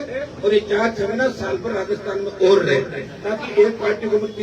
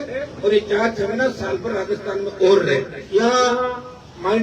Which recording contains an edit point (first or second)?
second